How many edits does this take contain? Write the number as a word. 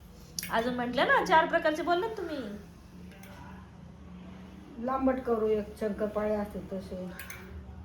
zero